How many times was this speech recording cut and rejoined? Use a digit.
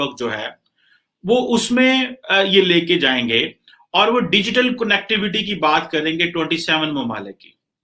0